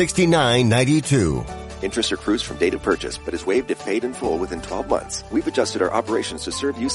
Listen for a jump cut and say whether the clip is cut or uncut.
cut